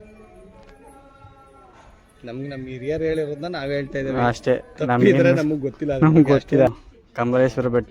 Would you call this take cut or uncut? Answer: cut